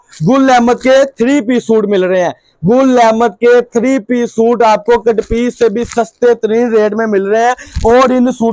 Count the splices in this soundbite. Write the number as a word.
zero